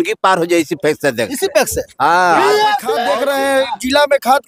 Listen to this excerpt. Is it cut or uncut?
cut